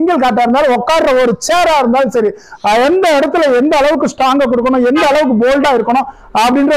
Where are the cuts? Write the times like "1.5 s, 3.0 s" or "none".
none